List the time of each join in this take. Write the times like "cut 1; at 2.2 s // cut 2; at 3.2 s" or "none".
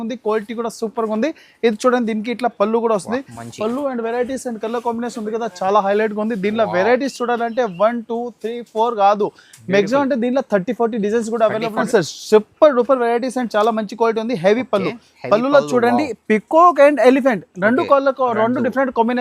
cut 1; at 11.8 s